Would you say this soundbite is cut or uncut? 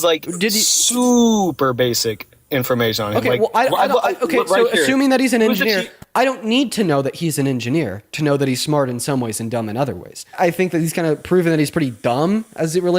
cut